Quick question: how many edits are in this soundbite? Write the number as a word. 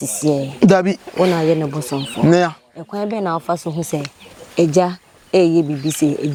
zero